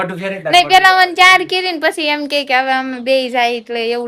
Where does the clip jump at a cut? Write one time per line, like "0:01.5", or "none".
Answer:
none